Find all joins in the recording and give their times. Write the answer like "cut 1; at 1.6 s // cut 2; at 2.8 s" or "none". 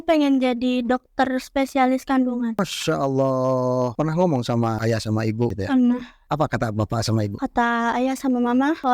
cut 1; at 3.9 s // cut 2; at 5.5 s // cut 3; at 6.2 s

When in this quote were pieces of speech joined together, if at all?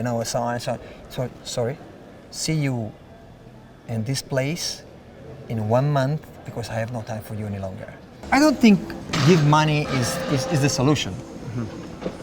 cut 1; at 8.1 s

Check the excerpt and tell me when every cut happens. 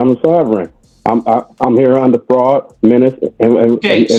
none

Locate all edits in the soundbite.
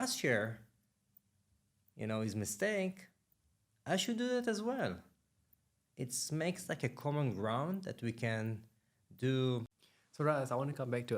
cut 1; at 9.7 s

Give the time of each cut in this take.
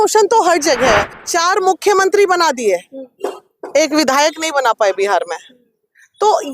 cut 1; at 1.2 s

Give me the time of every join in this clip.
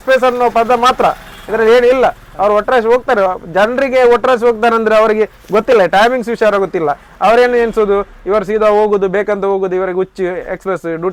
none

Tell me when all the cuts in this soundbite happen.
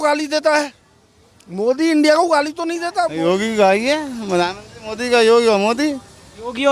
cut 1; at 3.1 s

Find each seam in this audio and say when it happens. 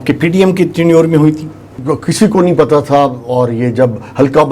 cut 1; at 1.7 s

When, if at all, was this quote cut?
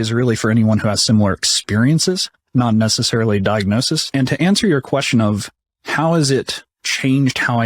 cut 1; at 4.0 s

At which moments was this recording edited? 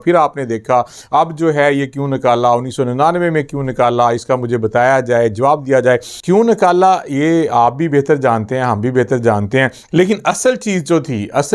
cut 1; at 6.1 s // cut 2; at 9.8 s

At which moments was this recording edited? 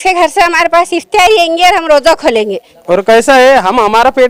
cut 1; at 2.7 s

